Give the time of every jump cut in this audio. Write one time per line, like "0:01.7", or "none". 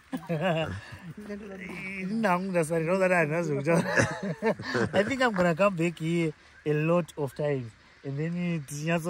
none